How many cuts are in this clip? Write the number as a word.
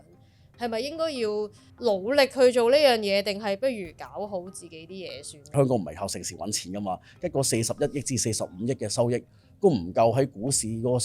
two